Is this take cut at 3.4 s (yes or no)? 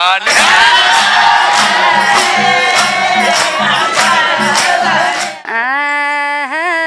no